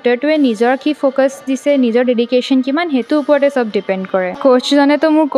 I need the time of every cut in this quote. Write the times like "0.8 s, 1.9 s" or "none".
4.4 s